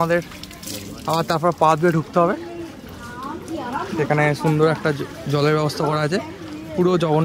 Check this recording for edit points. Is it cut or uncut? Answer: uncut